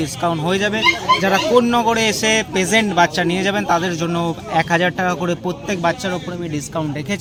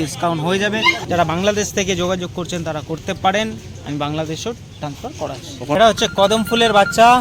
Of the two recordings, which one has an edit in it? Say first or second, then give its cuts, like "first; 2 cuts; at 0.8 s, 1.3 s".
second; 2 cuts; at 1.0 s, 5.8 s